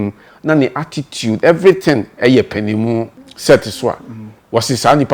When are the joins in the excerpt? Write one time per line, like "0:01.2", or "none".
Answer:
0:03.2